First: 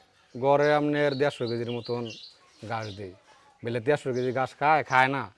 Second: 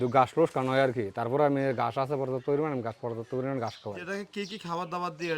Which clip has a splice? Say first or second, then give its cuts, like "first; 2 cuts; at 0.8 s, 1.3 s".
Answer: second; 1 cut; at 4.0 s